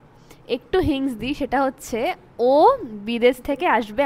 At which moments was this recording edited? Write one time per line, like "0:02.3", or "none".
none